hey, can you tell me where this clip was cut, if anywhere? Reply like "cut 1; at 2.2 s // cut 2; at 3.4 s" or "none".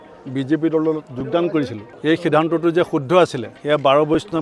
cut 1; at 1.8 s // cut 2; at 3.5 s